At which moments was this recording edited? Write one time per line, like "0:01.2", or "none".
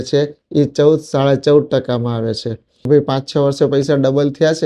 0:02.8

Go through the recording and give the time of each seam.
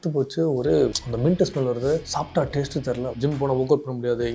0:01.0
0:02.1
0:03.2

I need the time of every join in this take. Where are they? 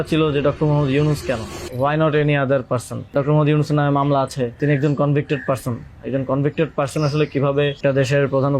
0:01.6
0:03.1
0:04.6
0:07.8

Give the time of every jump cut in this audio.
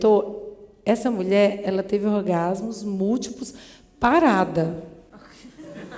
none

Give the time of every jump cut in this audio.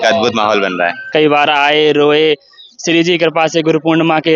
0:01.1

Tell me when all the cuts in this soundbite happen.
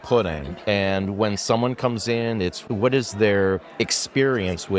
0:02.6

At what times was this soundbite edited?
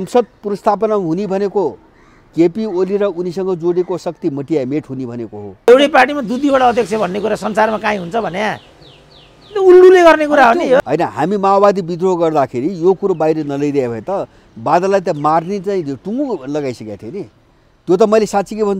0:05.7
0:10.8

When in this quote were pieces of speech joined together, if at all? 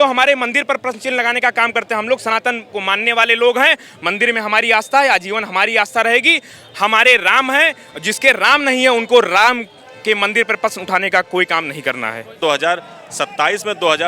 0:12.4

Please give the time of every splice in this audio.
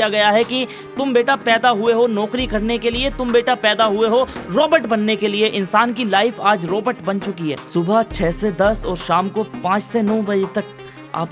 0:07.7

